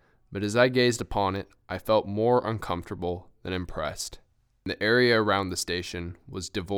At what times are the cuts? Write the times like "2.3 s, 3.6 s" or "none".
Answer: 4.7 s